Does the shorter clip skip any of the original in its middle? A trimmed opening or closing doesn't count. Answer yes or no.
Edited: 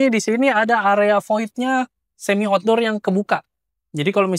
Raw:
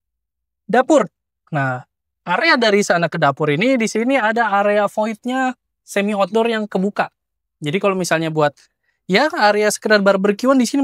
no